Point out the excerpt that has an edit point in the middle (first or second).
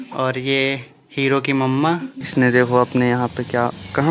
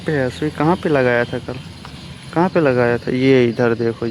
first